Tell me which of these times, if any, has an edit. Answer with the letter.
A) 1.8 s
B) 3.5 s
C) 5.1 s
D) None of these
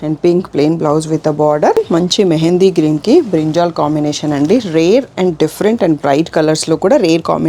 A